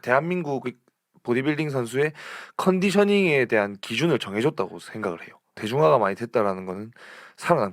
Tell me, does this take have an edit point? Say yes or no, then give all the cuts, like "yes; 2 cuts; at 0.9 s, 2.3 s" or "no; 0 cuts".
yes; 1 cut; at 5.5 s